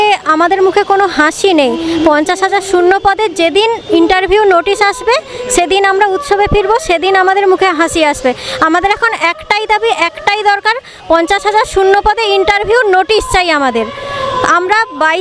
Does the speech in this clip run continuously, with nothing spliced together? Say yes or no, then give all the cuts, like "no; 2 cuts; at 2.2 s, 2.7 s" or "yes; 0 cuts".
yes; 0 cuts